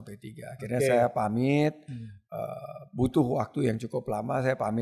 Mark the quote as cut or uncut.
uncut